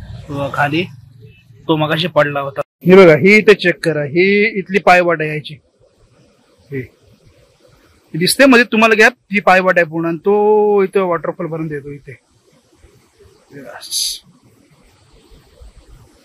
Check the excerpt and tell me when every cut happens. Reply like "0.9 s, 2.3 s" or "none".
2.7 s